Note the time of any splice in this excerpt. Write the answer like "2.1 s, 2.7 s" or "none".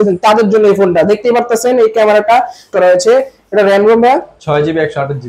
2.7 s